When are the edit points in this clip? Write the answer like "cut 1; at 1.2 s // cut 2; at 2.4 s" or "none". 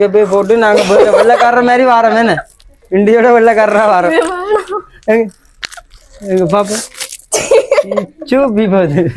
none